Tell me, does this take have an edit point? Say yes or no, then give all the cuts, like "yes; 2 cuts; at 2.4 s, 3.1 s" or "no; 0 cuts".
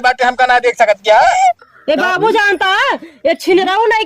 yes; 1 cut; at 1.6 s